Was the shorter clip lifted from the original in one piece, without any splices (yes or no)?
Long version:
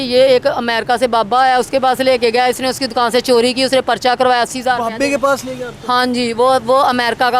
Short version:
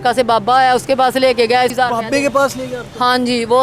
no